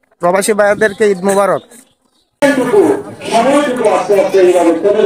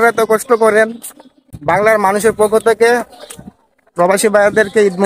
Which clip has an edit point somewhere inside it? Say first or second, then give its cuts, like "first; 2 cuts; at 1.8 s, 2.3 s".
first; 1 cut; at 2.4 s